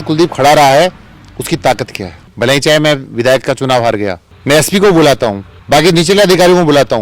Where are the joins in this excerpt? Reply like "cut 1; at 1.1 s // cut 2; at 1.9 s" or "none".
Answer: cut 1; at 2.2 s // cut 2; at 4.2 s